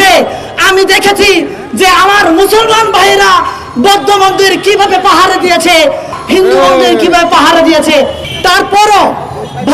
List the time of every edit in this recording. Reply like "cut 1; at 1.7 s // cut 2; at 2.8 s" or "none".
cut 1; at 6.2 s // cut 2; at 8.2 s